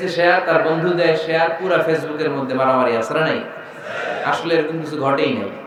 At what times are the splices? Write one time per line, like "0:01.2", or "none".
none